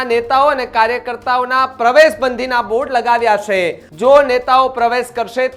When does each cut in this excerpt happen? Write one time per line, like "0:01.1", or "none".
0:03.8